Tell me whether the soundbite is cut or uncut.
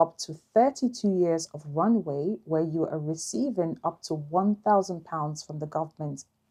uncut